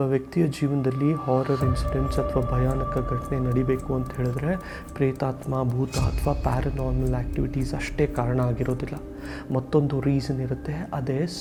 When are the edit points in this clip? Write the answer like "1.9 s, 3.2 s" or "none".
none